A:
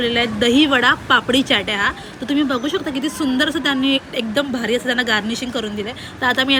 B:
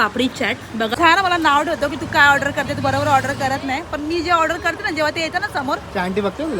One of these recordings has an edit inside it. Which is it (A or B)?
B